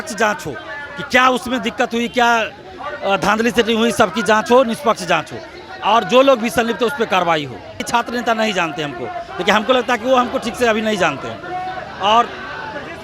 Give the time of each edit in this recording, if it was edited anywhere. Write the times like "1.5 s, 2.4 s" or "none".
7.8 s